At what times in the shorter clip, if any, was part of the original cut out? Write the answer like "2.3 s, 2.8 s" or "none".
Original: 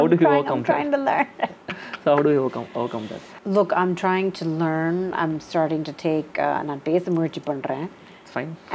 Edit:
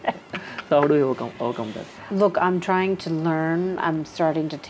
none

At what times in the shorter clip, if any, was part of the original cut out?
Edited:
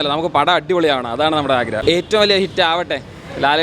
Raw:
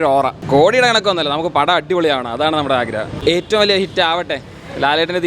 1.8 s

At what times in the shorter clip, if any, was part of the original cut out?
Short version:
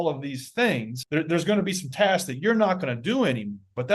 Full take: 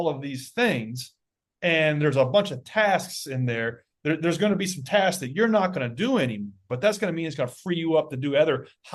0.9 s

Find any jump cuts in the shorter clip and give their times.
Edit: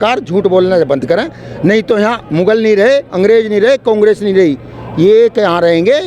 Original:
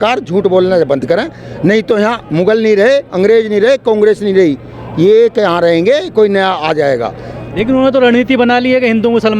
none

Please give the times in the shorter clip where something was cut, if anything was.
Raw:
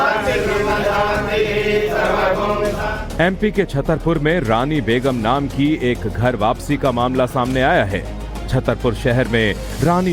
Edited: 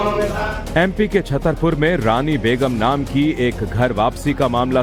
none

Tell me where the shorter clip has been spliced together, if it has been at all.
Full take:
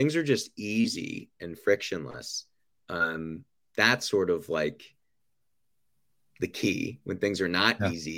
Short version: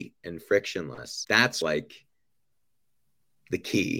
1.6 s

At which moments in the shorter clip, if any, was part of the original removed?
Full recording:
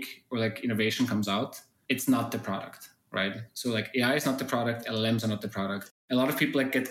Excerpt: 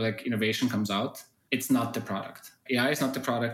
2.6 s

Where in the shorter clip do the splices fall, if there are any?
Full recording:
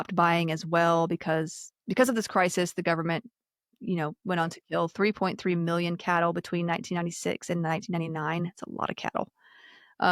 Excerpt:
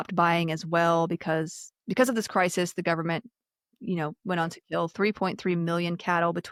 none

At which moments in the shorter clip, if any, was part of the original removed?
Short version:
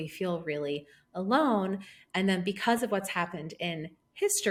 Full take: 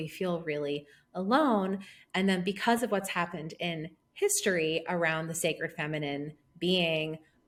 none

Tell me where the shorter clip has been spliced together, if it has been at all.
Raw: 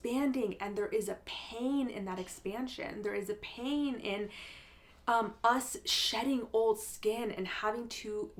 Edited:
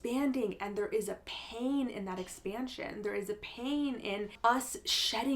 4.3 s

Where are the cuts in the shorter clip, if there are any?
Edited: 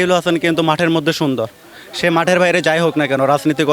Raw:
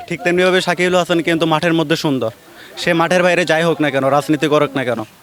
none

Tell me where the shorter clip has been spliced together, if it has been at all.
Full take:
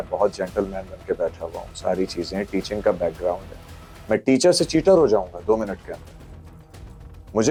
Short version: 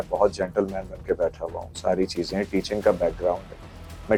none

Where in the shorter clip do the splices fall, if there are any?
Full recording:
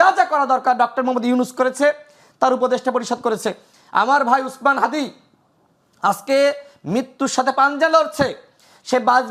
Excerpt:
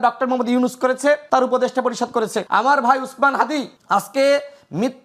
1.2 s, 2.4 s, 3.7 s

